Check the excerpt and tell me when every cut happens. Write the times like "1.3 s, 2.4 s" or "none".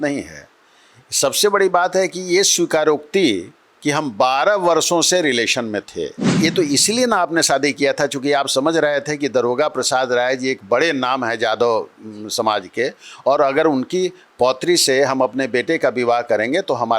6.4 s

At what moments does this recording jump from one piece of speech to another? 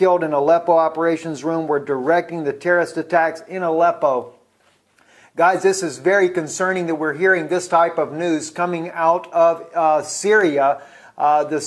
none

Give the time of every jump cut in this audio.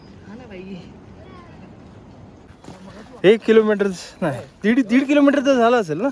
2.5 s

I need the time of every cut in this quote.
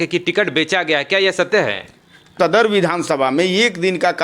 2.3 s

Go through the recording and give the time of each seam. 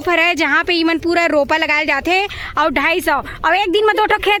none

